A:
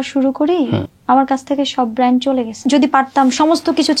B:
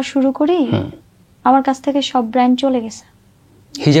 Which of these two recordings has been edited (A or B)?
A